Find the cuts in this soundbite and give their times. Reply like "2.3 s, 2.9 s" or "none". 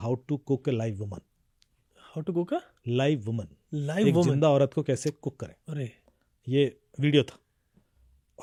none